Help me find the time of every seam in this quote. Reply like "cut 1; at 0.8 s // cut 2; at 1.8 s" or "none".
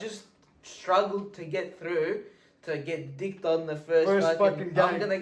none